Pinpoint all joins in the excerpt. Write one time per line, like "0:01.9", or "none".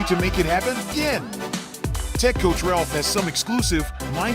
0:00.9